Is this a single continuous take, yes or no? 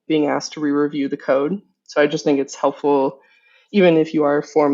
yes